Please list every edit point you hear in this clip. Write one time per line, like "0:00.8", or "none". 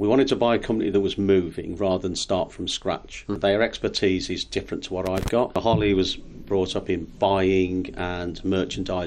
0:03.3
0:05.6